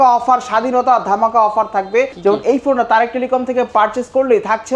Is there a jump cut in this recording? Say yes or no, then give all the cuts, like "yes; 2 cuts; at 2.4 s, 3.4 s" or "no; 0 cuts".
yes; 1 cut; at 2.1 s